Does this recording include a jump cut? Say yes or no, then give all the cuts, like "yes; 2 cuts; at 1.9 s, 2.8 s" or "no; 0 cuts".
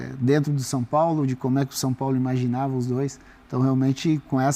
no; 0 cuts